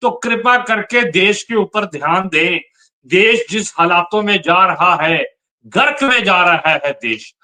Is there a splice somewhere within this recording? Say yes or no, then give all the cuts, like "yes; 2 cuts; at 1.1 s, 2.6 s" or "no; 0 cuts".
no; 0 cuts